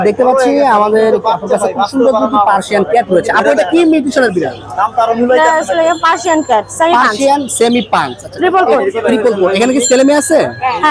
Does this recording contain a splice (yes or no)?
no